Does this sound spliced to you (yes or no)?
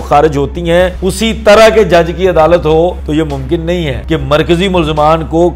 yes